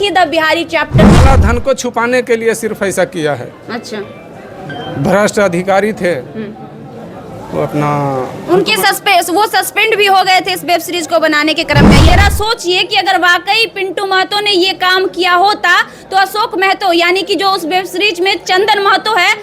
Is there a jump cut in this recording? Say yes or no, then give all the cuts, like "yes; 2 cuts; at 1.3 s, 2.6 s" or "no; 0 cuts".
yes; 2 cuts; at 1.2 s, 12.1 s